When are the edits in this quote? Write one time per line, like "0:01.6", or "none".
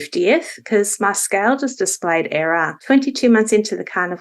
0:02.7